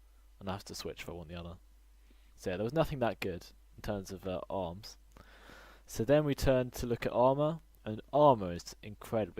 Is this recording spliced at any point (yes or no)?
yes